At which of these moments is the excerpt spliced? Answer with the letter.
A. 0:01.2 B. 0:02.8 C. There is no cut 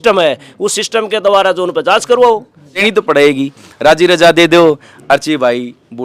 B